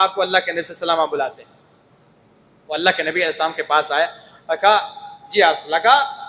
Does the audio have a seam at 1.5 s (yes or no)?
no